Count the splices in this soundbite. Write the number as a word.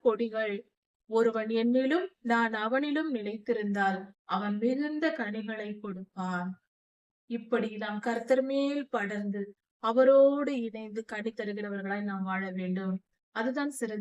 zero